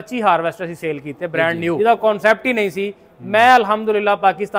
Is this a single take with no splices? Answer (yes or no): no